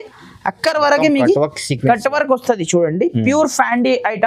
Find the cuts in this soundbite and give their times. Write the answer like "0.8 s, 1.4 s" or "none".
none